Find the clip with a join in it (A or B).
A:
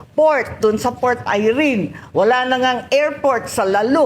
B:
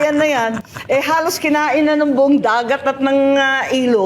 B